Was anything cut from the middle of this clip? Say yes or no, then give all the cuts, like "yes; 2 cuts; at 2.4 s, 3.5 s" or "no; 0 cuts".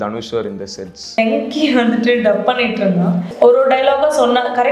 yes; 2 cuts; at 1.2 s, 3.3 s